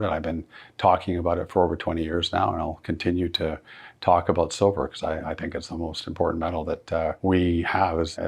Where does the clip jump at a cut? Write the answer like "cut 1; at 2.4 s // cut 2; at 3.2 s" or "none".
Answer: cut 1; at 7.2 s